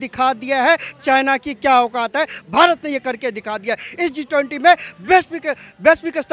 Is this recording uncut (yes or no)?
yes